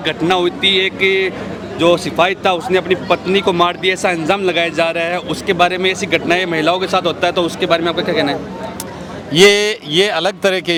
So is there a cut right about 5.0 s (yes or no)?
no